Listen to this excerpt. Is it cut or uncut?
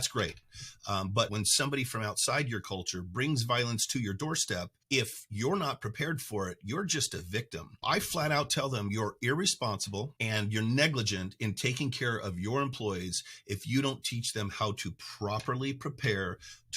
cut